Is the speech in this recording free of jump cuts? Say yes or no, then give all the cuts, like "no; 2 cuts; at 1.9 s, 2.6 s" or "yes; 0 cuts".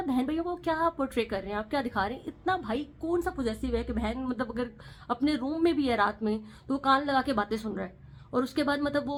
yes; 0 cuts